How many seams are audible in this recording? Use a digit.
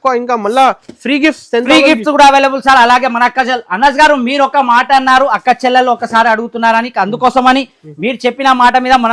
0